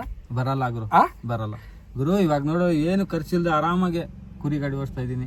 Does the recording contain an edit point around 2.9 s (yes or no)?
no